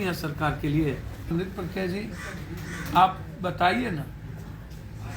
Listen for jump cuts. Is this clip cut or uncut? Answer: cut